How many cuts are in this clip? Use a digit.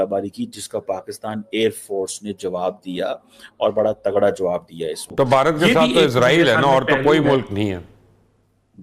1